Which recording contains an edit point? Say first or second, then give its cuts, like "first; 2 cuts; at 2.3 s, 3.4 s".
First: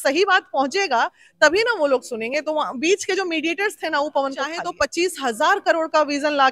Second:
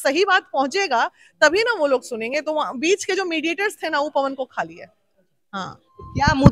first; 1 cut; at 4.6 s